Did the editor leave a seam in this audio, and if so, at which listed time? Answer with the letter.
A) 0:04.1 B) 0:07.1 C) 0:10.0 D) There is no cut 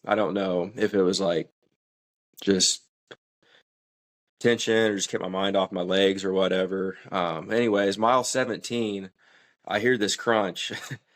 D